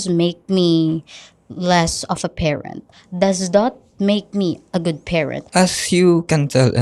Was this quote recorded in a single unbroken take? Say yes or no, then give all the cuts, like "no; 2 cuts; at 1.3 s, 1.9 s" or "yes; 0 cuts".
no; 1 cut; at 5.4 s